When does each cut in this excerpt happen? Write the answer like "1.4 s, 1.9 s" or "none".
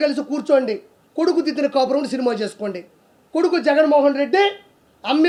none